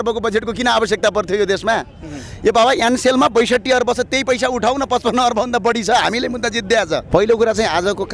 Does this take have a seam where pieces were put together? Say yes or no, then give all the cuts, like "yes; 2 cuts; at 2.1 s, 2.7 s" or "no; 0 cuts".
yes; 1 cut; at 7.0 s